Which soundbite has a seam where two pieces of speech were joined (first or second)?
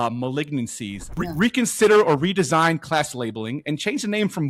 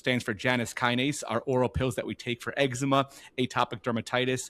first